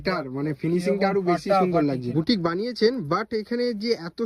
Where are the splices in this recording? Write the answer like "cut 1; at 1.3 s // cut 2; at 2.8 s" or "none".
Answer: cut 1; at 2.0 s